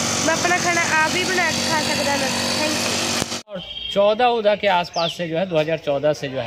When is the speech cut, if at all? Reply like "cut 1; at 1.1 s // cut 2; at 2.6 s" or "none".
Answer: cut 1; at 3.7 s